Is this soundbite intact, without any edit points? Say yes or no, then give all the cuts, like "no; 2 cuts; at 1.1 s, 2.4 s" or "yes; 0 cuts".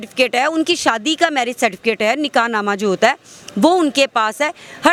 yes; 0 cuts